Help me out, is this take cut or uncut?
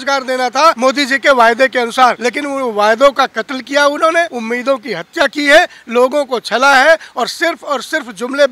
cut